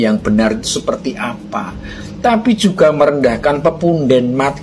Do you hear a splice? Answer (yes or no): no